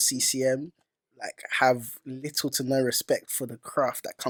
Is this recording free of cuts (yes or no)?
yes